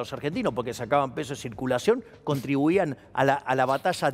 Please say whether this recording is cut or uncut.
uncut